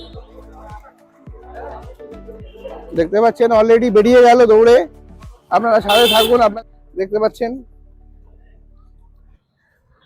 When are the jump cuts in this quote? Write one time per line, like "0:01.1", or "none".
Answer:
0:06.5